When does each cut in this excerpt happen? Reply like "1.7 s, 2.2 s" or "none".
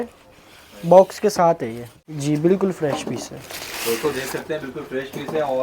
2.0 s